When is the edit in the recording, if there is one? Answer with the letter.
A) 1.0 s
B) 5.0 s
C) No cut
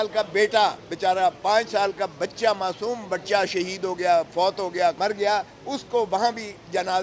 B